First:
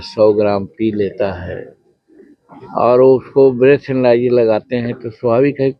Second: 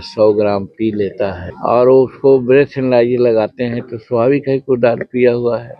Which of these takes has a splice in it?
second; 1 cut; at 1.5 s

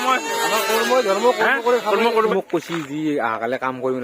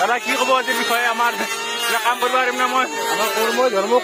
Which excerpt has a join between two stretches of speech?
first; 1 cut; at 2.3 s

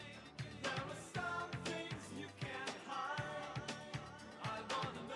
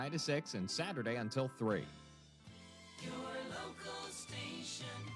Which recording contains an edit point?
second; 1 cut; at 2.0 s

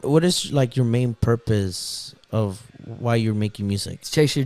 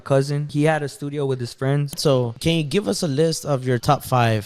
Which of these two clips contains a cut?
second; 1 cut; at 1.9 s

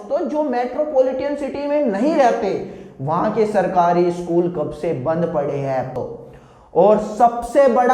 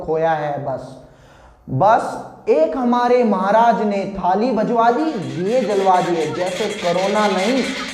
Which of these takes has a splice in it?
first; 1 cut; at 5.9 s

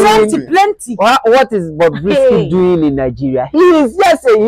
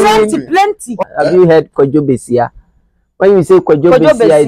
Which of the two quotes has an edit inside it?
second; 1 cut; at 1.0 s

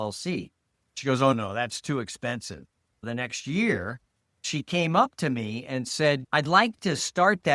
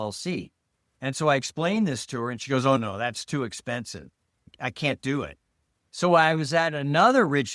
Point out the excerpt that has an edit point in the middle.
first; 3 cuts; at 0.9 s, 3.0 s, 4.5 s

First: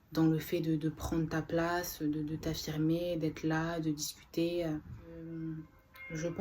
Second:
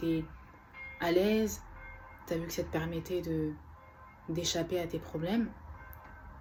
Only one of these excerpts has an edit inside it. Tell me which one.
first; 1 cut; at 5.2 s

